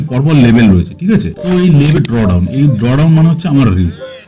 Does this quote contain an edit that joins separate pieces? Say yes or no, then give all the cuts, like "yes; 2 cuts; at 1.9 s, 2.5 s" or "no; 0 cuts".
yes; 1 cut; at 2.0 s